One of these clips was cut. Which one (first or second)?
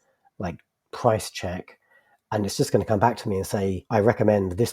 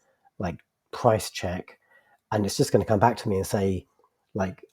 first